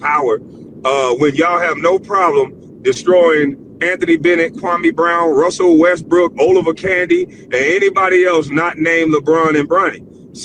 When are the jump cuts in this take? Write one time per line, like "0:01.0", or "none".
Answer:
none